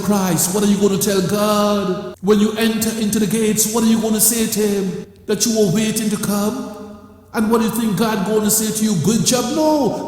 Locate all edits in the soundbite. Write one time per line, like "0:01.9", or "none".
0:02.1
0:05.1

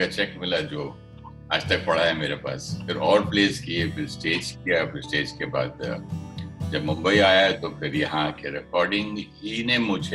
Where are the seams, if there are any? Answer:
0:02.9

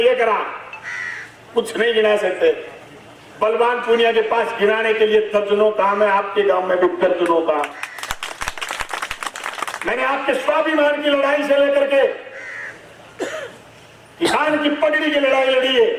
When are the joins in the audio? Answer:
none

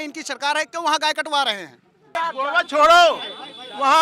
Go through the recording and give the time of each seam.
0:02.2

